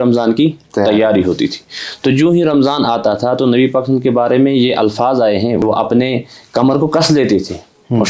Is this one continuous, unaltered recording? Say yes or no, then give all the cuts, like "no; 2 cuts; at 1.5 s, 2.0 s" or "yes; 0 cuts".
no; 1 cut; at 5.6 s